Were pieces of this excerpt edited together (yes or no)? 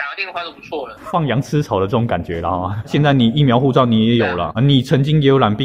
yes